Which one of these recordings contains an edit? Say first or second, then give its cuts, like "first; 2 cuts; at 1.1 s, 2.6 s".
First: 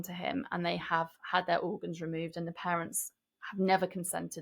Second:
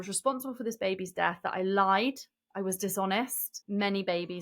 second; 1 cut; at 3.5 s